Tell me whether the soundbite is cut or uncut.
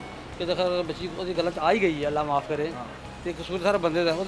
uncut